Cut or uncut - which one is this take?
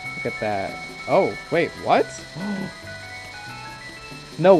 uncut